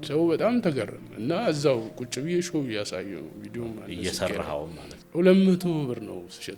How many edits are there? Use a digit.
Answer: 1